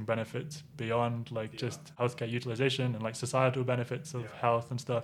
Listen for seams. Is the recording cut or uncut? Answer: cut